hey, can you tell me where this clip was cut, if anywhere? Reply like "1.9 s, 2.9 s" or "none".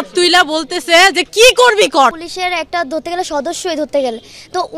2.2 s